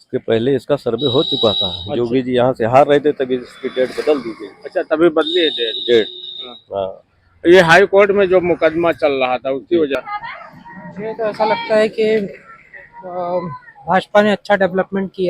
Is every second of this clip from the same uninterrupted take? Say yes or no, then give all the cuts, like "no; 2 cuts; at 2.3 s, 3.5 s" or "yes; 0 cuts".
no; 1 cut; at 9.9 s